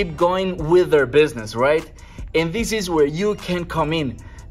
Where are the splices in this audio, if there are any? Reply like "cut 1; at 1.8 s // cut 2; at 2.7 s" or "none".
none